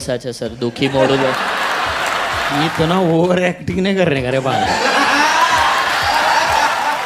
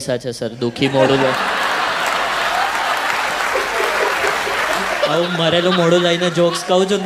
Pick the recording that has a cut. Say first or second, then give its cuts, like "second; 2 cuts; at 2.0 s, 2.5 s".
first; 1 cut; at 2.6 s